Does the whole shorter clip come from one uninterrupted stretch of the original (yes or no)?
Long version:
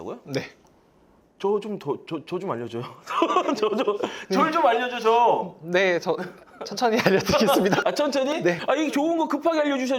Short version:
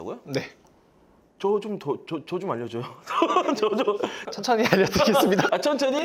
no